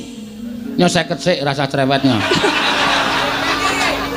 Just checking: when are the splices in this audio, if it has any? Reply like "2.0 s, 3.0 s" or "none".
none